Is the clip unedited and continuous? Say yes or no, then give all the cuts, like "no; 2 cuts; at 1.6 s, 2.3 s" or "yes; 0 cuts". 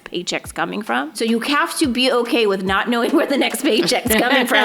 no; 1 cut; at 1.1 s